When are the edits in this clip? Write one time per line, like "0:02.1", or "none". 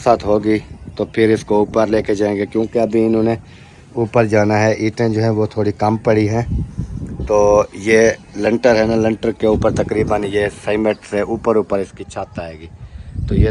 none